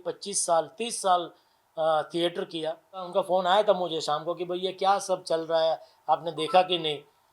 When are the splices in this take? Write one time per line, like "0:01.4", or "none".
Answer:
0:03.1